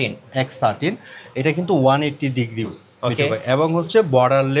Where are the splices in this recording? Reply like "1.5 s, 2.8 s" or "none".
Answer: none